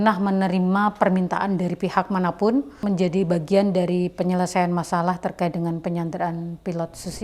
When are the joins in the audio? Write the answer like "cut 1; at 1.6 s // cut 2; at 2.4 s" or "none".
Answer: cut 1; at 2.8 s